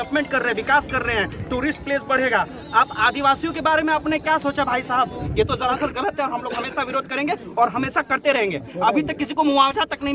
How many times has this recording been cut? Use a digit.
1